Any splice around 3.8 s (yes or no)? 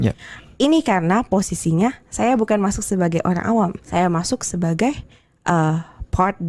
yes